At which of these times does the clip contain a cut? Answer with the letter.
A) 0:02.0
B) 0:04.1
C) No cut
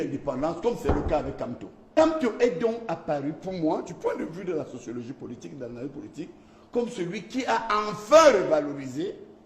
A